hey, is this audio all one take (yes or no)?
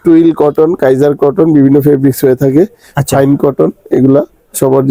yes